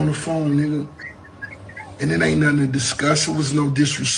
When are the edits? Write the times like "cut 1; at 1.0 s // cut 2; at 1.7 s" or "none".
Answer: none

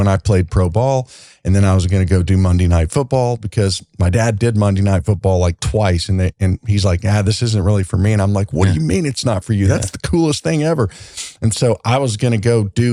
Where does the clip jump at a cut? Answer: none

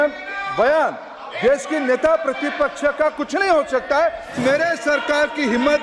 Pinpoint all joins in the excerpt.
cut 1; at 4.3 s

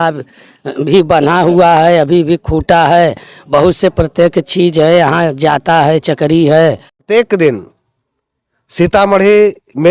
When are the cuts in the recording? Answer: cut 1; at 7.1 s

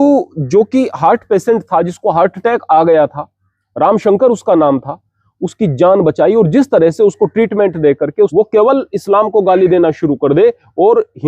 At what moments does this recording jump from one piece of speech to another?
cut 1; at 8.3 s

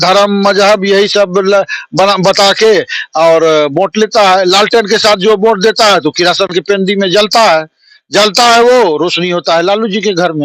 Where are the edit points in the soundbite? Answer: none

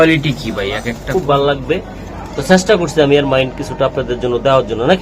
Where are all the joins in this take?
cut 1; at 1.0 s

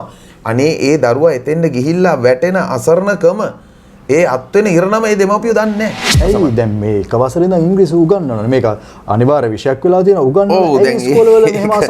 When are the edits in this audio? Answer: cut 1; at 6.1 s

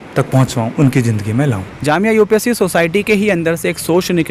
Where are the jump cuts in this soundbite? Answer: cut 1; at 1.7 s

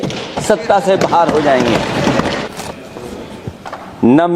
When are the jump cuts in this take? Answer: cut 1; at 2.4 s

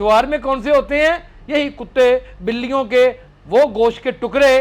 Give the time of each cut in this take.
cut 1; at 3.2 s

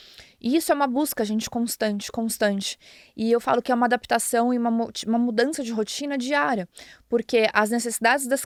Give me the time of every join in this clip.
none

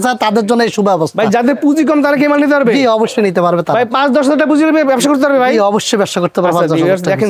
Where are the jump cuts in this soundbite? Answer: none

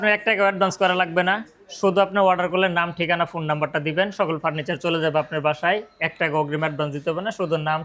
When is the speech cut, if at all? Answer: none

